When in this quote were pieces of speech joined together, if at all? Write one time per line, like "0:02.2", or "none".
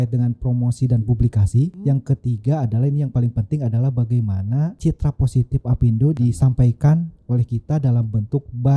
0:01.8
0:04.8
0:06.2